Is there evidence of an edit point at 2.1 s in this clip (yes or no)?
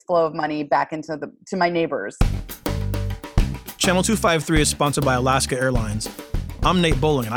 yes